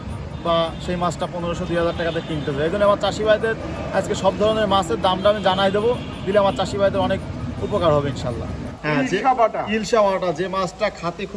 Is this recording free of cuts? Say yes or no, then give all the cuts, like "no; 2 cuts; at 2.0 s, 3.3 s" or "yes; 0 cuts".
no; 1 cut; at 8.8 s